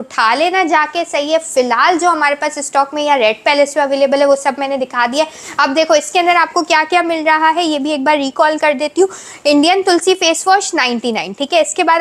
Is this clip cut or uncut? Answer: uncut